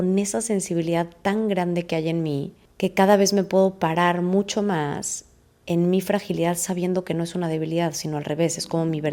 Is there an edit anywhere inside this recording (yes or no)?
no